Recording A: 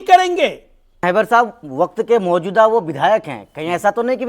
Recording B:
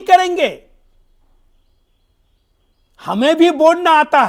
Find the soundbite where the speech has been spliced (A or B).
A